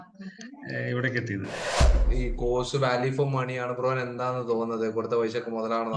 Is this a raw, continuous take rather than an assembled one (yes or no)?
no